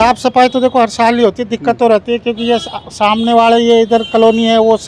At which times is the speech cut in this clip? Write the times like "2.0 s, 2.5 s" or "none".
none